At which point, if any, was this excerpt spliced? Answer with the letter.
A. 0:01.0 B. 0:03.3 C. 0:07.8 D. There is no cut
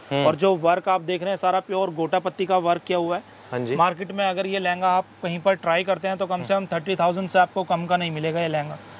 D